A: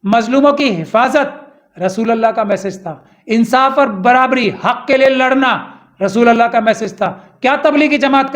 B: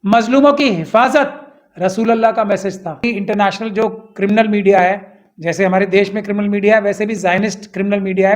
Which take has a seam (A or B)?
B